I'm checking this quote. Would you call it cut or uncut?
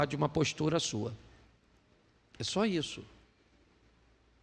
uncut